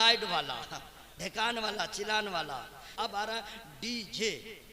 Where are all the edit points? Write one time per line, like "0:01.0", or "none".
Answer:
0:02.9